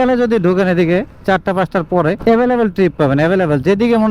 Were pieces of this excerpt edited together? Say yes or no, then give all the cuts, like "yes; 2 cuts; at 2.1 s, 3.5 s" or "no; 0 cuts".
no; 0 cuts